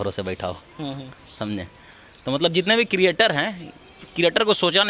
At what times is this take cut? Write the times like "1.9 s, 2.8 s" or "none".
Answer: none